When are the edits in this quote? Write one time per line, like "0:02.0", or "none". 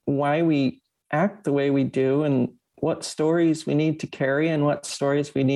none